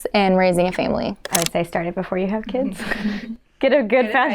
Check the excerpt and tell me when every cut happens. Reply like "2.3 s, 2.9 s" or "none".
1.2 s